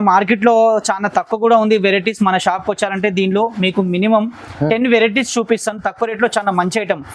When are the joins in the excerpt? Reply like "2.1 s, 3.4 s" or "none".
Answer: none